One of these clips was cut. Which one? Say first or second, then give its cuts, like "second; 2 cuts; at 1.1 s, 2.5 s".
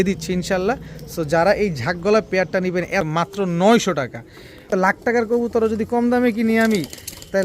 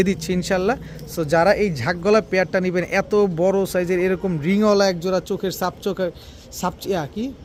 first; 2 cuts; at 3.1 s, 4.7 s